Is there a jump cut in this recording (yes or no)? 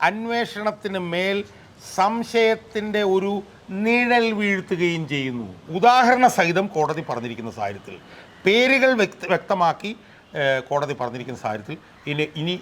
yes